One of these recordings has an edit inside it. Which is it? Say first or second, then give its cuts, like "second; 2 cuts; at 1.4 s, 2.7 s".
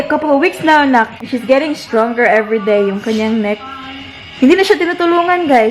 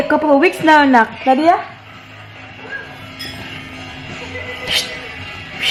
first; 1 cut; at 1.1 s